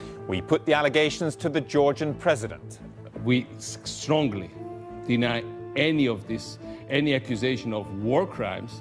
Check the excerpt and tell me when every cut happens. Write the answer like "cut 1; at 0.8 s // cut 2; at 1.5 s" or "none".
cut 1; at 1.3 s